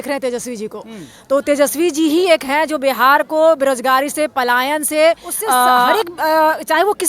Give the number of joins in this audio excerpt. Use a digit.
1